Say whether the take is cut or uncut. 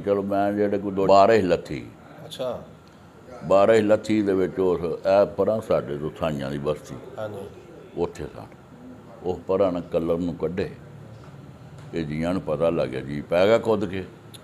cut